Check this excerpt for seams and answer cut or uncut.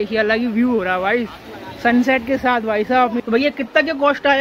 cut